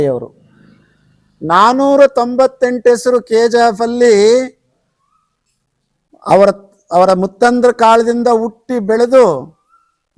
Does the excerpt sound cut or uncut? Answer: uncut